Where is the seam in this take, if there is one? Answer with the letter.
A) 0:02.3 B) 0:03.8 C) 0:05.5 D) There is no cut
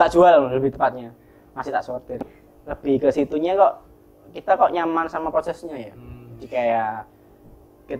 A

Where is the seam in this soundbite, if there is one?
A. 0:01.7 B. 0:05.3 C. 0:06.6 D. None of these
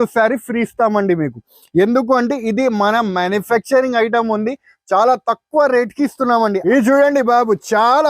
C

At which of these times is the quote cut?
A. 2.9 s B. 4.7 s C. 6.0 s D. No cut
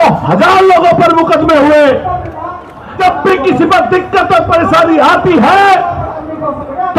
A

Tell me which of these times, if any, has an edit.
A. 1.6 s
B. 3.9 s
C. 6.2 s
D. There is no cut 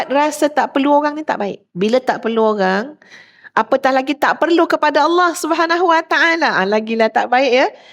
A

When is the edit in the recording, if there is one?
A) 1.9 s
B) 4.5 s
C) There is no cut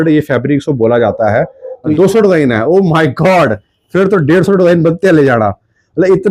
A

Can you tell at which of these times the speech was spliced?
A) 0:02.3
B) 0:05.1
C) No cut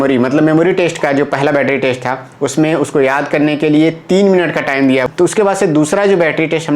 B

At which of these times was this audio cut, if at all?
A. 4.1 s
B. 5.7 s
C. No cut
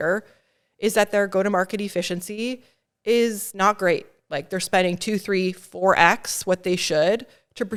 C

